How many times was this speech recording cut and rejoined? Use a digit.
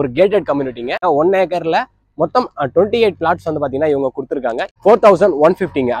2